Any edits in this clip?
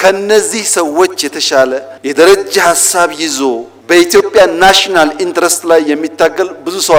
no; 0 cuts

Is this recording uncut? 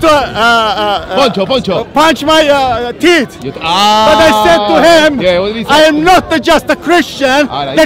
yes; 0 cuts

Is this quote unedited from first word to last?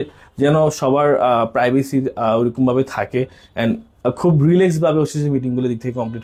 yes; 0 cuts

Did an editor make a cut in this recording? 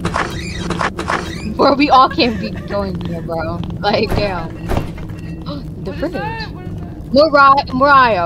no; 0 cuts

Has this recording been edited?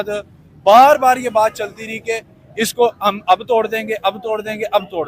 no; 0 cuts

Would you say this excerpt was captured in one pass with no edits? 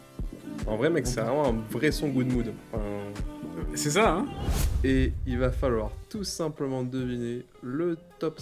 no; 1 cut; at 4.5 s

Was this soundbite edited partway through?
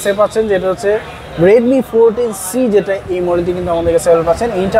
no; 0 cuts

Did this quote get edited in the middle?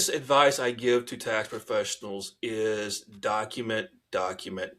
no; 0 cuts

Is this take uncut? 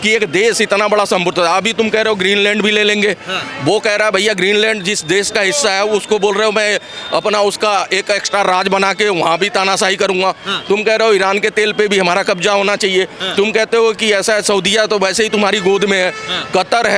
yes; 0 cuts

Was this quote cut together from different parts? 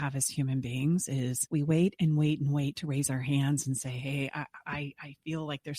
yes; 1 cut; at 1.4 s

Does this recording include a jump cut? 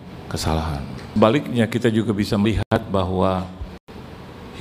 yes; 1 cut; at 1.2 s

